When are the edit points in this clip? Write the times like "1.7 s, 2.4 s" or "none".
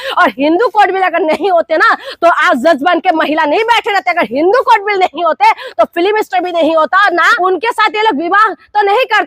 7.3 s